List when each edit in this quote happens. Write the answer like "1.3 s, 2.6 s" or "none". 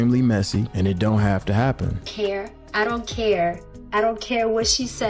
2.0 s